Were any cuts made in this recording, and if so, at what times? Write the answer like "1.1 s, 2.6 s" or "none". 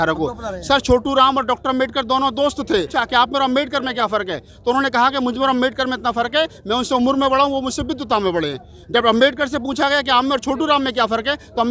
3.0 s